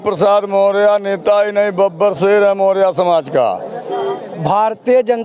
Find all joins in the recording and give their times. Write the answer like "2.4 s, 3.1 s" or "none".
4.2 s